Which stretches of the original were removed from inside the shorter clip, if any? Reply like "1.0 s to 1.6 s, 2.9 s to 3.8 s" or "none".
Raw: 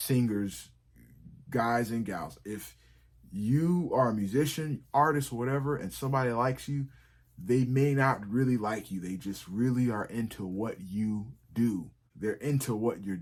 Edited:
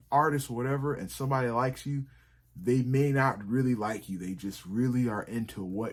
none